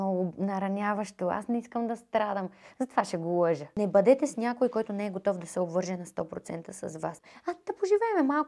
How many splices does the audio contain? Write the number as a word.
two